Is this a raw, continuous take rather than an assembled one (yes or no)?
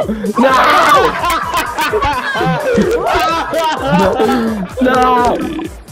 yes